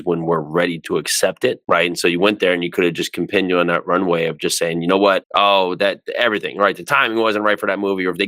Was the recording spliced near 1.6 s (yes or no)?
yes